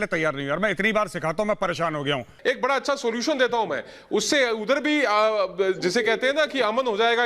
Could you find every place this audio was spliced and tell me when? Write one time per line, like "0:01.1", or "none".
0:02.3